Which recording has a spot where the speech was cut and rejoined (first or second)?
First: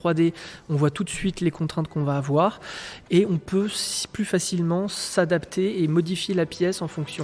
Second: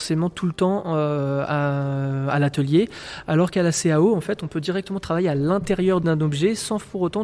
second